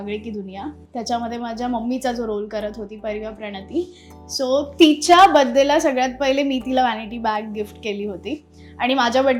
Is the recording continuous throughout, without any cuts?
yes; 0 cuts

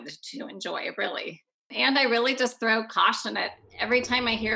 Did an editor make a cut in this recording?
yes; 1 cut; at 1.3 s

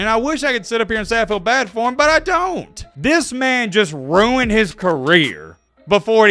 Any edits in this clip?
no; 0 cuts

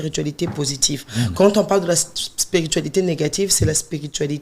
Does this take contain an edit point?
no; 0 cuts

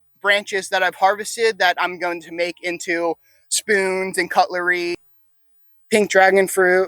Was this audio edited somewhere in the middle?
yes; 1 cut; at 5.0 s

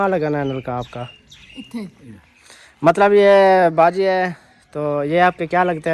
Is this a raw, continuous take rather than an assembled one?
yes; 0 cuts

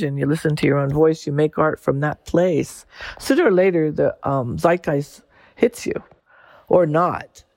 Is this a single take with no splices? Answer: no; 1 cut; at 6.4 s

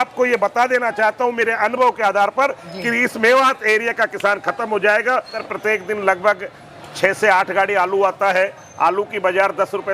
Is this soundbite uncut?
no; 1 cut; at 5.4 s

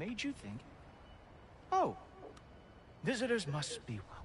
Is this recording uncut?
yes; 0 cuts

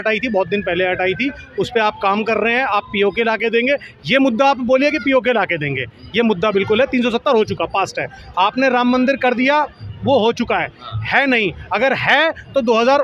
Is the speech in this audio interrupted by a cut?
no; 0 cuts

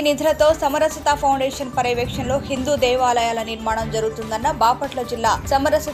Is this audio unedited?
yes; 0 cuts

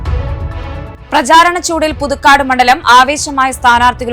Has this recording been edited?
no; 0 cuts

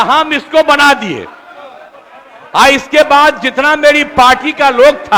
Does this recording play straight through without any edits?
yes; 0 cuts

